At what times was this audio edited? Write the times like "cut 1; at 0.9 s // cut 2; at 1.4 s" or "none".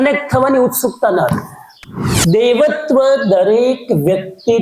cut 1; at 2.1 s